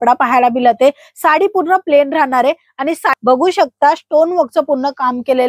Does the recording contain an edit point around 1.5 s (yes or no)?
no